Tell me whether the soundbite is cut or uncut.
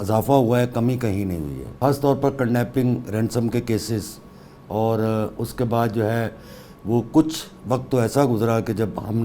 cut